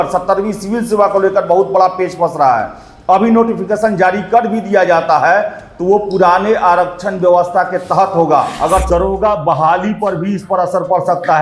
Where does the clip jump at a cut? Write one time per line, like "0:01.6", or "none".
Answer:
0:08.8